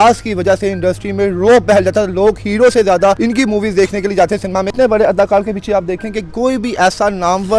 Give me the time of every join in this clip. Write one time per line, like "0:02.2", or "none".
0:03.2
0:04.7